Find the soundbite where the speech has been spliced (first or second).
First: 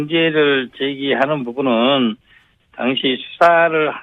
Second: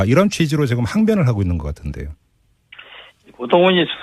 second